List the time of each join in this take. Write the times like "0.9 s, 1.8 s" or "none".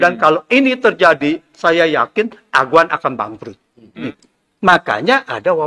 4.1 s